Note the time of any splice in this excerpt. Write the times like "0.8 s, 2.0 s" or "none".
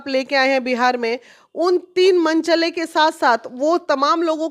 none